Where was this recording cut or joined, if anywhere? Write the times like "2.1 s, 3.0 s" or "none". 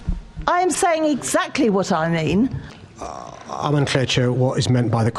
2.6 s